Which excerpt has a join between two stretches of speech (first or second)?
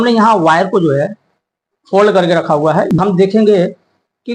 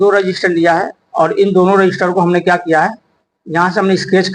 first